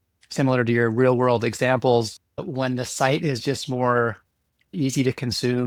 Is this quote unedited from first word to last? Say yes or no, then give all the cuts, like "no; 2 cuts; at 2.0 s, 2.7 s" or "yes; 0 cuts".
yes; 0 cuts